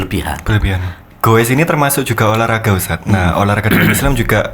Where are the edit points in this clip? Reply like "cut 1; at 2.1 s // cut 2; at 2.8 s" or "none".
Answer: cut 1; at 1.0 s

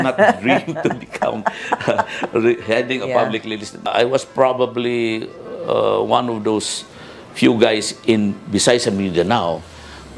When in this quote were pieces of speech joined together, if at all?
cut 1; at 3.9 s

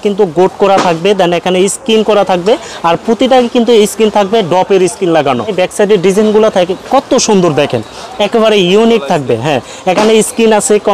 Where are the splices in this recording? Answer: none

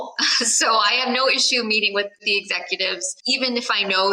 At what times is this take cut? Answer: cut 1; at 2.2 s // cut 2; at 3.1 s

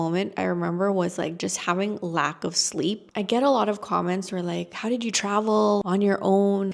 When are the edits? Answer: cut 1; at 3.0 s

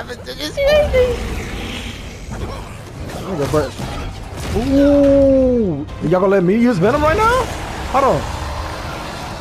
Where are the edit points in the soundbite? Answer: cut 1; at 5.9 s

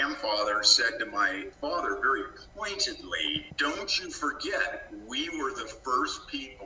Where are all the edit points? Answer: cut 1; at 1.5 s // cut 2; at 3.5 s

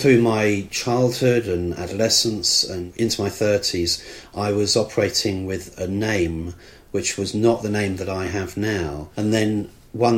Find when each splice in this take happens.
cut 1; at 2.9 s // cut 2; at 9.0 s

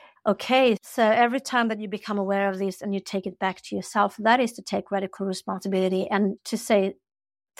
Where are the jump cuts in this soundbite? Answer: cut 1; at 0.8 s // cut 2; at 6.4 s

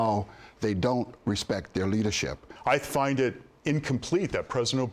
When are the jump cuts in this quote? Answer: cut 1; at 2.5 s

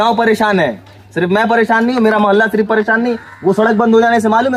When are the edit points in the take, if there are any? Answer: none

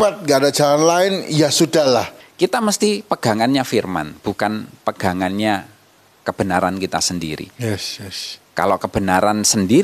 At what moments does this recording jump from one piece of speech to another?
cut 1; at 2.2 s

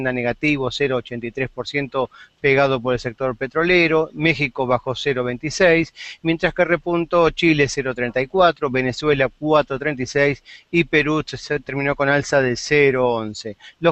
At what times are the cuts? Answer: none

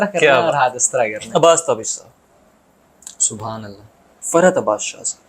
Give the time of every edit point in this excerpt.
cut 1; at 1.2 s // cut 2; at 4.1 s

